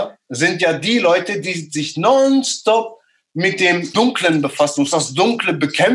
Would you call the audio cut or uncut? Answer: cut